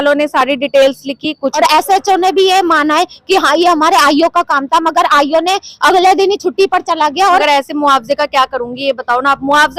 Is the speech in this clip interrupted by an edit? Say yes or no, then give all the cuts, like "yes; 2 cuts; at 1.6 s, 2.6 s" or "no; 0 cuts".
yes; 2 cuts; at 1.5 s, 7.4 s